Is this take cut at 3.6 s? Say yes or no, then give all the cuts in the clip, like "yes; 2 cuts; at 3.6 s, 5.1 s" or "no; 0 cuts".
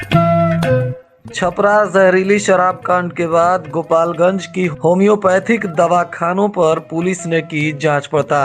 no; 1 cut; at 1.0 s